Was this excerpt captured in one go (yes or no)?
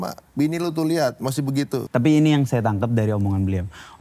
no